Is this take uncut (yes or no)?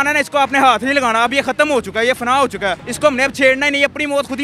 no